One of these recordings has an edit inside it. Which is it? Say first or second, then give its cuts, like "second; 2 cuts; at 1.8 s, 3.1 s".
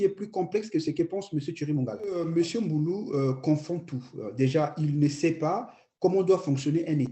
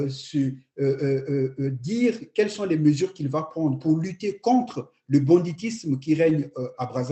first; 1 cut; at 2.2 s